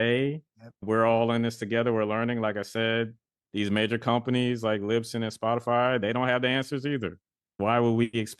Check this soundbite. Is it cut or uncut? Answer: uncut